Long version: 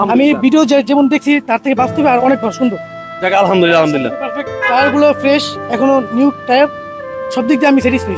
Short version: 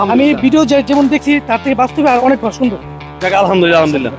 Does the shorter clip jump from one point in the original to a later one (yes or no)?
no